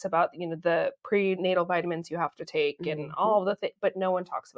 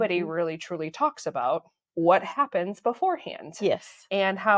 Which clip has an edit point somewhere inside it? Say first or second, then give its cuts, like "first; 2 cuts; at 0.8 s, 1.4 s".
second; 1 cut; at 1.8 s